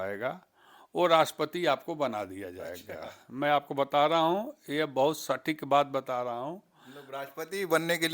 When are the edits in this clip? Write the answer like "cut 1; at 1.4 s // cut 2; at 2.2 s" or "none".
none